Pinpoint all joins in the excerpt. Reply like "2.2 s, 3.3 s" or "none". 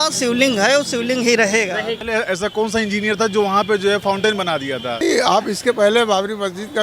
2.0 s, 5.0 s